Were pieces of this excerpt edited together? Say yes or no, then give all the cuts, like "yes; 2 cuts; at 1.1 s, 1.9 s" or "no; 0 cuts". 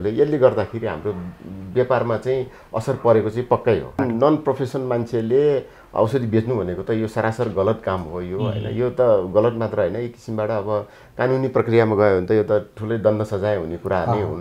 yes; 1 cut; at 4.0 s